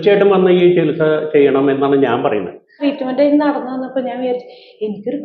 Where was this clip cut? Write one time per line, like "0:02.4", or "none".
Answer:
0:02.8